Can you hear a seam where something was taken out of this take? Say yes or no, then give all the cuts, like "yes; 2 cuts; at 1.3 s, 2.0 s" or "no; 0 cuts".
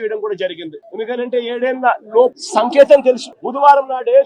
yes; 1 cut; at 2.4 s